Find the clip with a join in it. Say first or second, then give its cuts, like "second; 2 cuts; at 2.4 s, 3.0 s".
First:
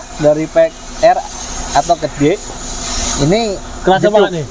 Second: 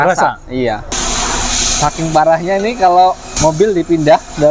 second; 2 cuts; at 1.0 s, 3.3 s